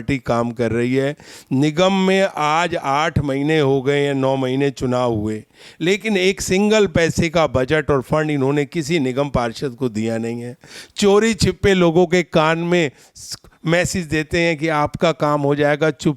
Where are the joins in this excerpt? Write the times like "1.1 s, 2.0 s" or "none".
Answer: none